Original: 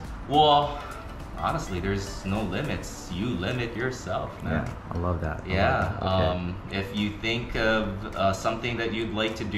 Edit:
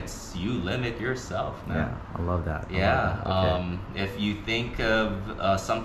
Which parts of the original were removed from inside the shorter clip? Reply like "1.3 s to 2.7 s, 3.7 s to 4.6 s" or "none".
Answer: none